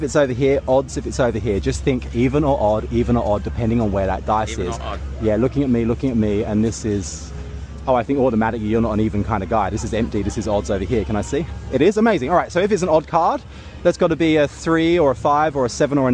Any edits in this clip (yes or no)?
yes